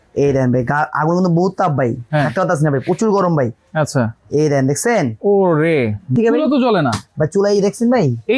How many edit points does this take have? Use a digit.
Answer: 1